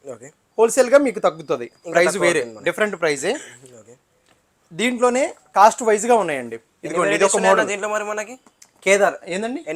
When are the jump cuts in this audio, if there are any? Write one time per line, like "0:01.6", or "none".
none